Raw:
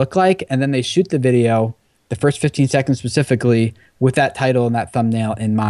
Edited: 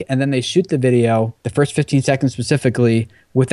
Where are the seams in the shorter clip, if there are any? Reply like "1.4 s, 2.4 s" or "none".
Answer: 1.4 s